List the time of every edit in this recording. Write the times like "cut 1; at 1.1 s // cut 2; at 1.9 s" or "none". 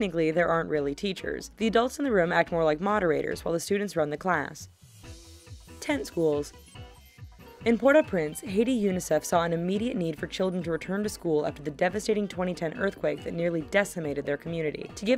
cut 1; at 8.5 s